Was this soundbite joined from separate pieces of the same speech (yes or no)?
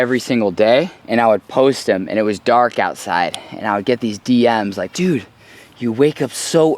yes